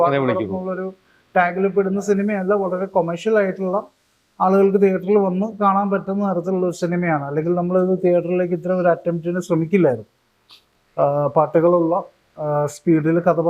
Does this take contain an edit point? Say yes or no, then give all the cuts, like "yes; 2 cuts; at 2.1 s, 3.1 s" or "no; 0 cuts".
no; 0 cuts